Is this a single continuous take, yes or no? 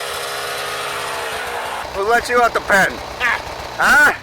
no